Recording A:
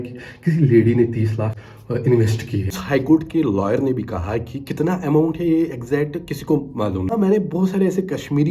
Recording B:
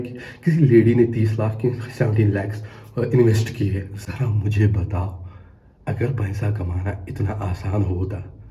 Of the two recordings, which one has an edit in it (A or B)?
A